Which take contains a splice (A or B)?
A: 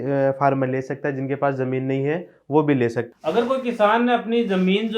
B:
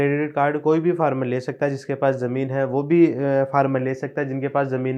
A